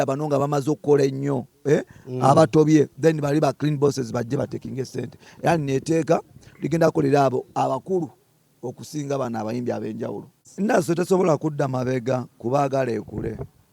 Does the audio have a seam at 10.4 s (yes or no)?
yes